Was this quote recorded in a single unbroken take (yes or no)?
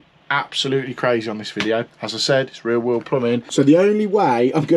no